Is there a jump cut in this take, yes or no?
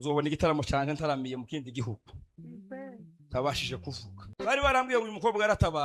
yes